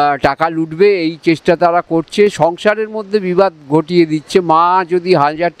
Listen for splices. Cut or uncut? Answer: uncut